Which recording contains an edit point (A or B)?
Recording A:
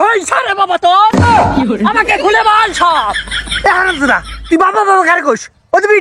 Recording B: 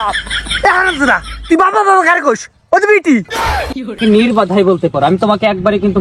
B